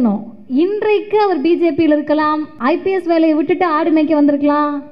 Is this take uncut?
no; 1 cut; at 2.5 s

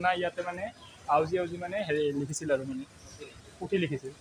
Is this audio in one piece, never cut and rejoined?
yes; 0 cuts

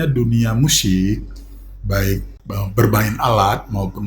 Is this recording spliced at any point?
yes; 1 cut; at 2.4 s

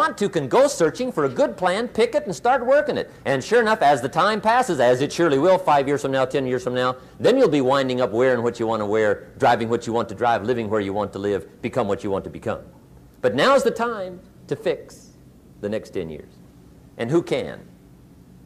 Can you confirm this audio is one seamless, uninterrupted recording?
no; 1 cut; at 7.8 s

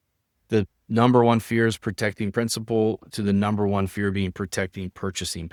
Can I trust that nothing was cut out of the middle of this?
yes; 0 cuts

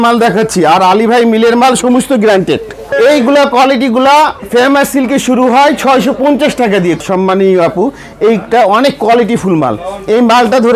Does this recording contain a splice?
yes; 2 cuts; at 2.9 s, 7.0 s

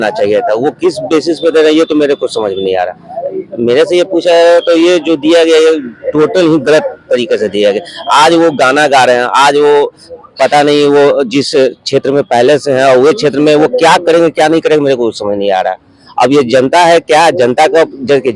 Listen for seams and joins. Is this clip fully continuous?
yes; 0 cuts

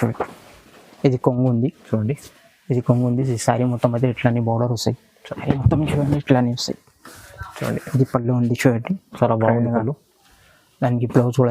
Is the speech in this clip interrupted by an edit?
yes; 1 cut; at 5.4 s

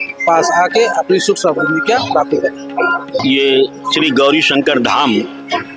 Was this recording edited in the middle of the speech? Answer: yes; 1 cut; at 3.1 s

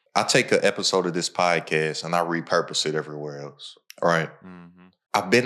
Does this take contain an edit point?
no; 0 cuts

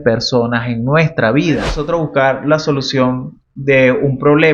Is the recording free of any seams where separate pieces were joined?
no; 1 cut; at 1.7 s

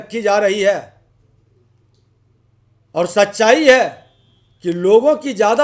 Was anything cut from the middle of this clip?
no; 0 cuts

